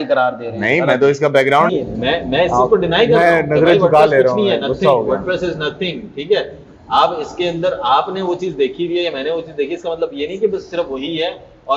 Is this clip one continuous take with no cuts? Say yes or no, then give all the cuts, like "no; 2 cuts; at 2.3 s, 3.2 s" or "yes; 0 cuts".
no; 1 cut; at 1.7 s